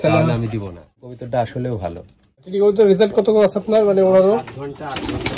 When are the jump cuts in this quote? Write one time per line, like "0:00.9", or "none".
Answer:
0:00.9
0:02.5